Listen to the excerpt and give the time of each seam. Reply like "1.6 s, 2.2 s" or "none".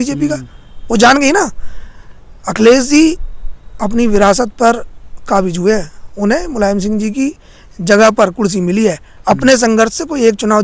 none